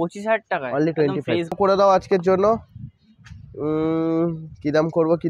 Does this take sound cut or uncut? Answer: cut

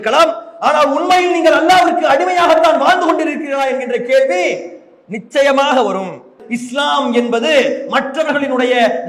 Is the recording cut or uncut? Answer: cut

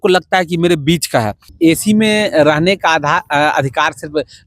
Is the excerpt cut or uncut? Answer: cut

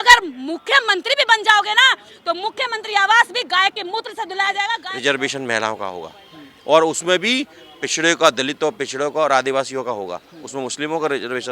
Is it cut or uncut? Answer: cut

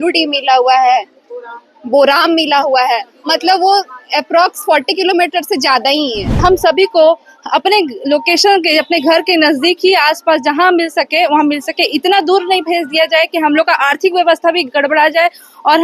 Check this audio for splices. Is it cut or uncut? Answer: cut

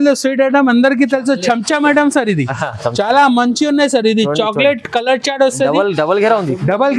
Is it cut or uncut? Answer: uncut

